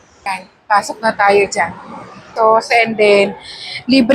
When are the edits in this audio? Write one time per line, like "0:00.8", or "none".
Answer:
0:02.3